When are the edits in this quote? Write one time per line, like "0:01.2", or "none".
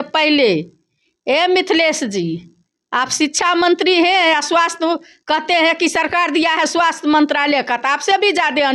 none